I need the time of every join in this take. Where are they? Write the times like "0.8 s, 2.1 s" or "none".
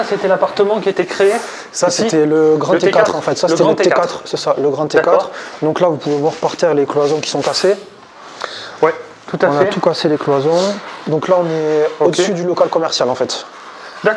none